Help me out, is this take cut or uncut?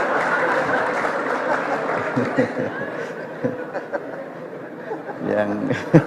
uncut